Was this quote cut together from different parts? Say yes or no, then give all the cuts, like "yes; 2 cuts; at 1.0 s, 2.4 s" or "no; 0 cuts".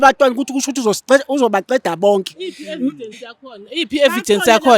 no; 0 cuts